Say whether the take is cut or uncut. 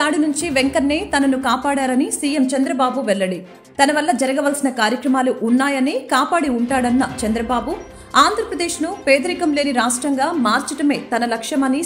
uncut